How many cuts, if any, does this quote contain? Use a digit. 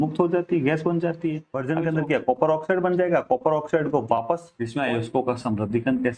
2